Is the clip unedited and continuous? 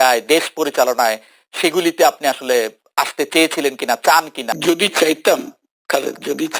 no; 1 cut; at 4.5 s

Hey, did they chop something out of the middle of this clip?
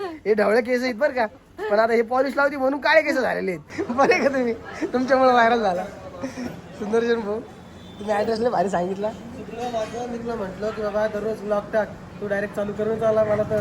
yes; 1 cut; at 3.7 s

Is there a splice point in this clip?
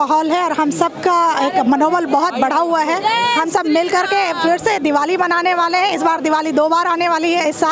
no; 0 cuts

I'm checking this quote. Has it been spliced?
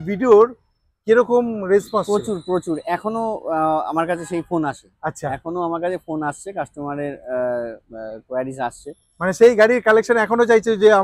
no; 0 cuts

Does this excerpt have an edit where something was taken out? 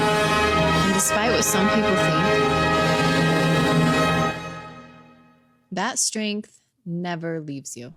no; 0 cuts

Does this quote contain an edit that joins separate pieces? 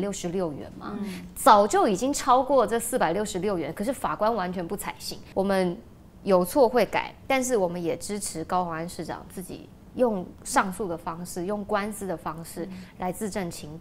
no; 0 cuts

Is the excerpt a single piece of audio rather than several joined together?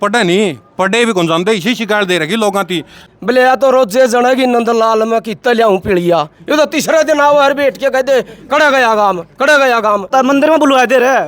no; 2 cuts; at 3.1 s, 10.1 s

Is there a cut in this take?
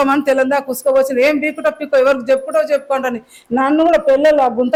no; 0 cuts

